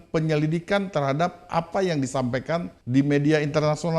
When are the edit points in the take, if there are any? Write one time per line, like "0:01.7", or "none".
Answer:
0:02.8